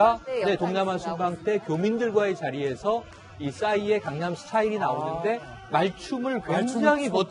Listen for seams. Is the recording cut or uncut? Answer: cut